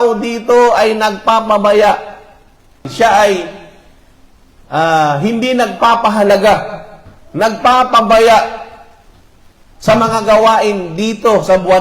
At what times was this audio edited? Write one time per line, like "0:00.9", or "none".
0:02.9